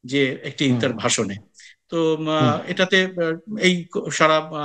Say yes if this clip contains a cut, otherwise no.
no